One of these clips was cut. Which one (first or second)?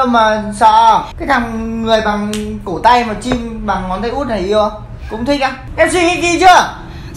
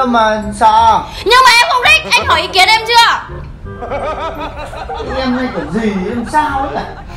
first